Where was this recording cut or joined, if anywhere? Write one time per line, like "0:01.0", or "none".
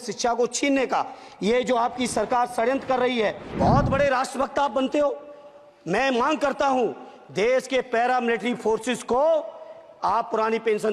0:03.5